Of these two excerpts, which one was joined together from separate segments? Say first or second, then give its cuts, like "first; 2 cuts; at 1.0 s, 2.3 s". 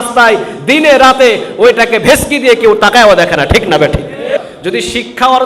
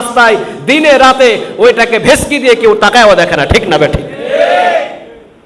first; 1 cut; at 4.4 s